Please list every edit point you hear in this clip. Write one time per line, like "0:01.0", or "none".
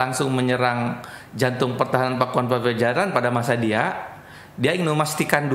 none